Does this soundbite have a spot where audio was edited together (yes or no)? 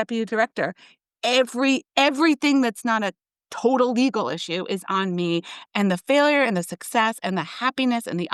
no